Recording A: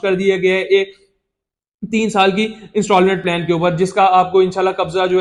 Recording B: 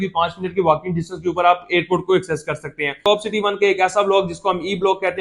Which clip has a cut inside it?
B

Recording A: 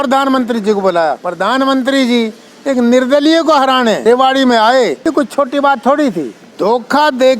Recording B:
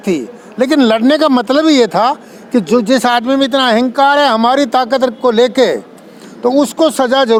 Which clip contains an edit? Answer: A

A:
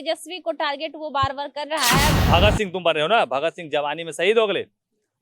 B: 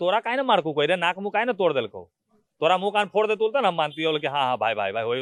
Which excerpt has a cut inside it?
A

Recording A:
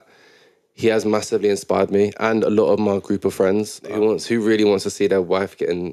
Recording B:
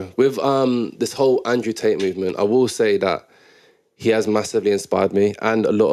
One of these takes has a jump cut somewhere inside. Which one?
A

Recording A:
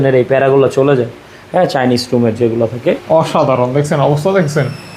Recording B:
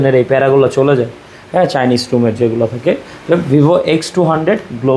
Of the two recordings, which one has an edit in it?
A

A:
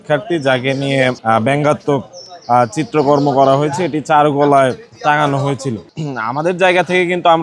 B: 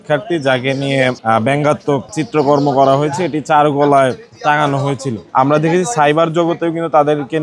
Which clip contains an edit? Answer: B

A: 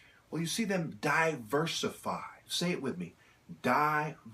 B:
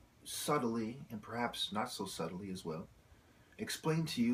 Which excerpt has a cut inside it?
A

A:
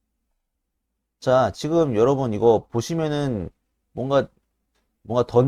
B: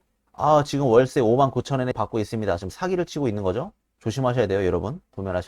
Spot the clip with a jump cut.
B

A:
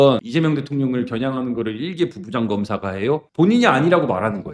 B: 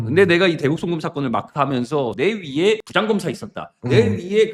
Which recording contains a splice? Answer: A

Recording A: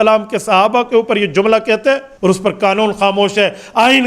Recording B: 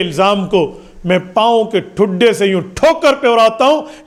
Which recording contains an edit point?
A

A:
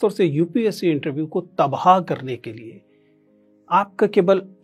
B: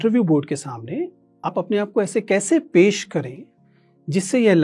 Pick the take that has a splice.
B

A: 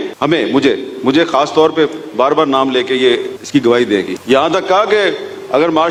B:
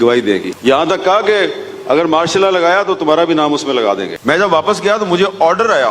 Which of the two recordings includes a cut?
B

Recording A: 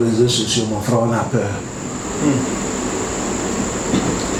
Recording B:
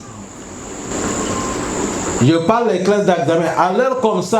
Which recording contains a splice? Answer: B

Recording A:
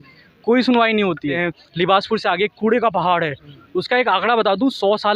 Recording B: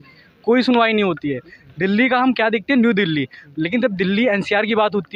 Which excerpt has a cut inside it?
A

